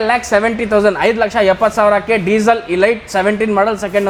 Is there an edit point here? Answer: no; 0 cuts

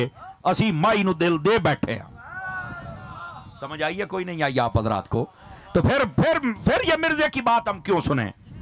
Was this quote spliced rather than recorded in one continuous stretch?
no; 0 cuts

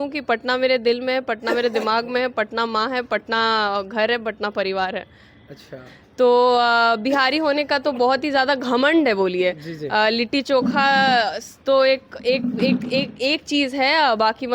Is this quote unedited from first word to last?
yes; 0 cuts

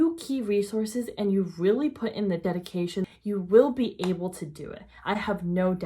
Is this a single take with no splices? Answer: no; 1 cut; at 2.8 s

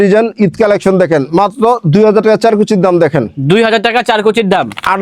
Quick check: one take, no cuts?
yes; 0 cuts

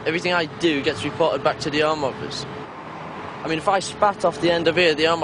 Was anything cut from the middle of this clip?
no; 0 cuts

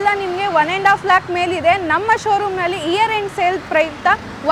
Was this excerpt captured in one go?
yes; 0 cuts

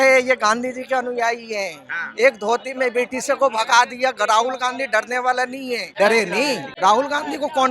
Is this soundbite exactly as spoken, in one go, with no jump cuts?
no; 2 cuts; at 5.8 s, 6.7 s

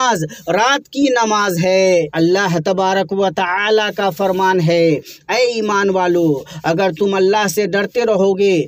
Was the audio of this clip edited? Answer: yes; 1 cut; at 2.1 s

